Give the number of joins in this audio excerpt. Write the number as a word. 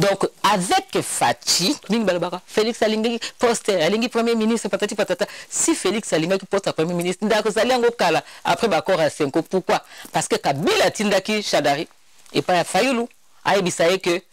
one